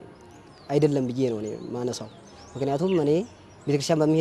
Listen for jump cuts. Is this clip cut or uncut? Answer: uncut